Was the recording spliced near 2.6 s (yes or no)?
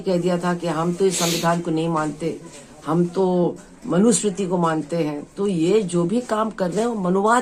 no